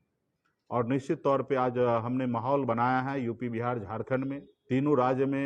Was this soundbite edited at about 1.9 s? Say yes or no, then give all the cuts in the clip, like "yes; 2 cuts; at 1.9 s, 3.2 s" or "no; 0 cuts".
no; 1 cut; at 4.5 s